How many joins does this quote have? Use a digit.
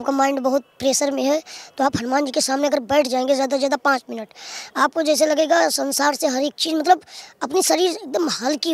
0